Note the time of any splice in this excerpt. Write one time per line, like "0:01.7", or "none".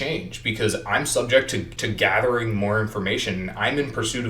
0:01.8